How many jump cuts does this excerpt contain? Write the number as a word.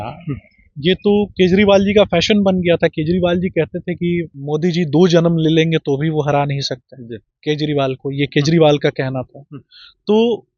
one